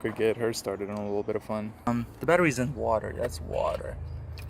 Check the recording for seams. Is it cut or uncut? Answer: cut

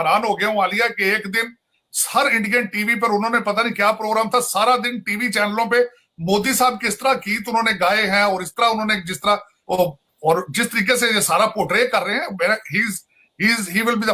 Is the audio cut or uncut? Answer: uncut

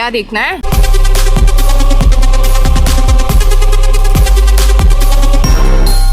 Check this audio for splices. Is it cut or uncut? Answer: uncut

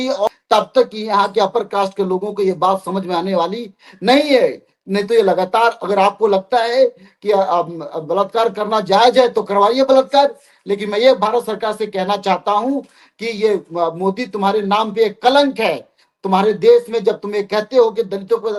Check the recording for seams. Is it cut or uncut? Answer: uncut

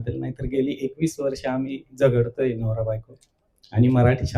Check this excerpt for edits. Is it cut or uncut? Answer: uncut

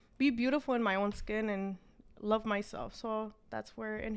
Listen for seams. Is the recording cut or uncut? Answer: uncut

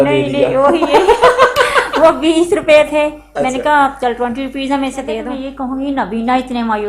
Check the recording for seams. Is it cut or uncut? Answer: cut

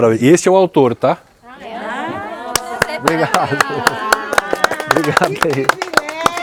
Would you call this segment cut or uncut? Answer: uncut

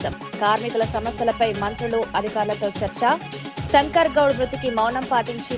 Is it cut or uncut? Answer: uncut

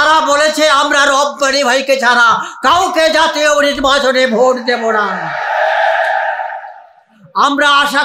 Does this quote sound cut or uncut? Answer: uncut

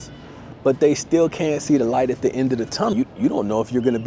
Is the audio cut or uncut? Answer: cut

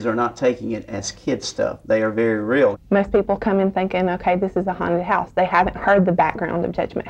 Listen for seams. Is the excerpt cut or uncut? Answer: cut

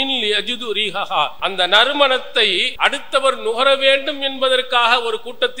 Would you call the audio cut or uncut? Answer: cut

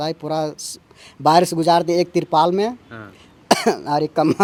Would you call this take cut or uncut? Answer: uncut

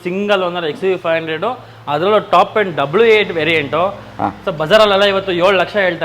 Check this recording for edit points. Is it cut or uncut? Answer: uncut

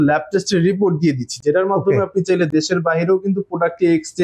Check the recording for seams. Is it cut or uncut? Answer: uncut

